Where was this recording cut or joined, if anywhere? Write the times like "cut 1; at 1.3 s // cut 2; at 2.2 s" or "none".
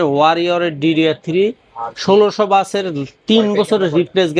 none